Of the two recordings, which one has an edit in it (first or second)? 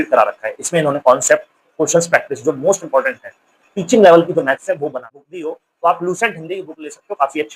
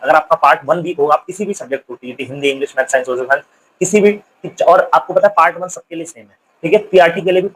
first